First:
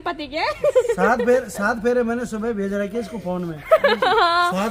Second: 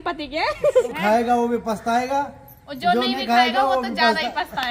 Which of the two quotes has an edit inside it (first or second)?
second